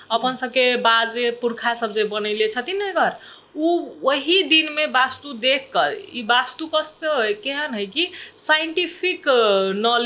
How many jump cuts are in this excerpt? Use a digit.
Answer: 0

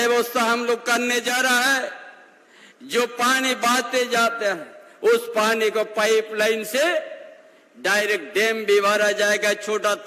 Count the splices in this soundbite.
0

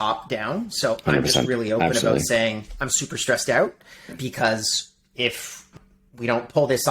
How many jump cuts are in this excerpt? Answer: 2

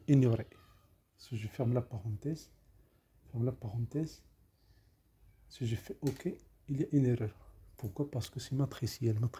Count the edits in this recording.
0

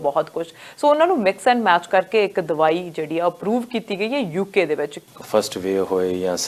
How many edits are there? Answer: 1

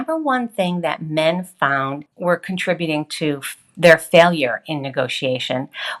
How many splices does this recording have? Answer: 1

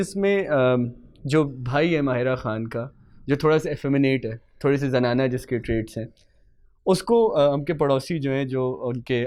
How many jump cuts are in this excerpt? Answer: 0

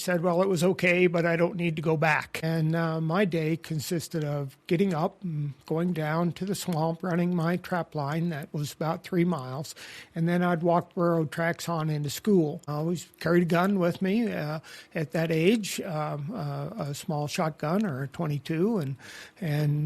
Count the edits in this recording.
2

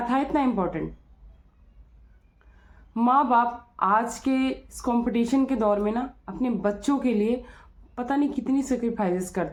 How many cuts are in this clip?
0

